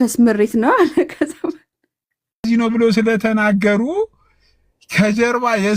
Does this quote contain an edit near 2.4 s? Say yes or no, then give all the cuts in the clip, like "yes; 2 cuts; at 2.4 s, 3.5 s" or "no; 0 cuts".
yes; 1 cut; at 2.4 s